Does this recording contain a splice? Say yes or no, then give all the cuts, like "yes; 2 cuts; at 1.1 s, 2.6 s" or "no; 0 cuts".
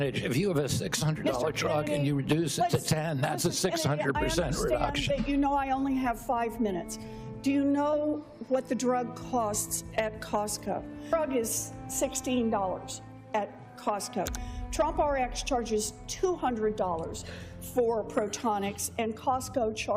yes; 1 cut; at 11.1 s